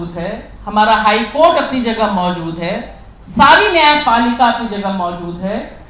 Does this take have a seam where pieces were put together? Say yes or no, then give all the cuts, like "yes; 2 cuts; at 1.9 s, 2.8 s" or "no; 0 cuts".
no; 0 cuts